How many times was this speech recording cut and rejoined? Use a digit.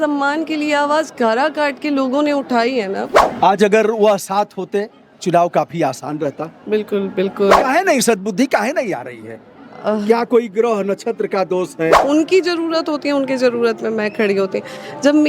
3